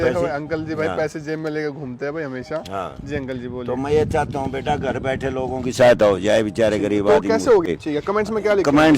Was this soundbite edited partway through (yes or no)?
yes